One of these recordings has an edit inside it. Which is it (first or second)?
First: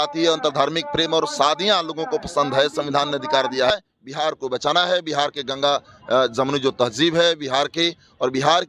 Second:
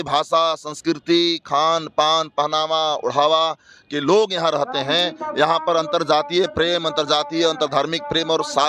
first